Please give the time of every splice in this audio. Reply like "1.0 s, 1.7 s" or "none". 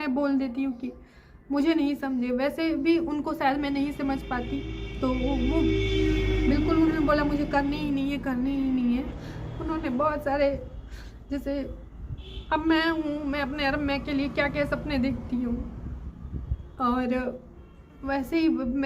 9.1 s